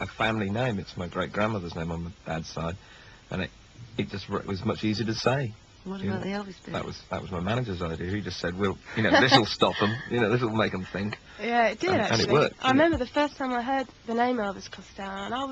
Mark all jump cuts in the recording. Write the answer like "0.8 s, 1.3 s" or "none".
1.4 s